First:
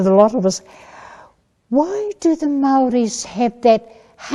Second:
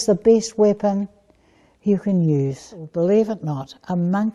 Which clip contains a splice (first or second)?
second